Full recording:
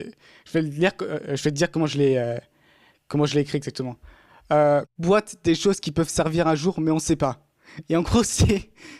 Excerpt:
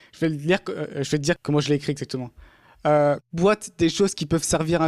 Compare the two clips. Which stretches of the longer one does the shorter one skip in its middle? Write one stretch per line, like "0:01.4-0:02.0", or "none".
0:01.7-0:03.0